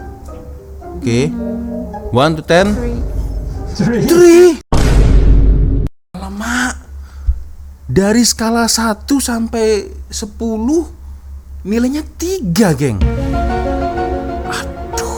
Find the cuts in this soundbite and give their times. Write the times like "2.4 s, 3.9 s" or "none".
none